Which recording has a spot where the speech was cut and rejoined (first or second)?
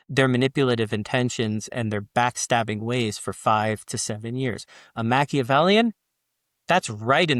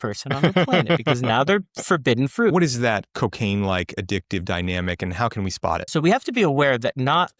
second